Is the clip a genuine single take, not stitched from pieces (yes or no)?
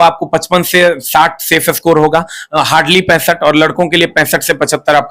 yes